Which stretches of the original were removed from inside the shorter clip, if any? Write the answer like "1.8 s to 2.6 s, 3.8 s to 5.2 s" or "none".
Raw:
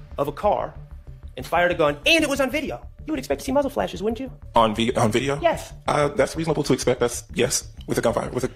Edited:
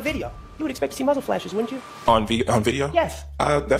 none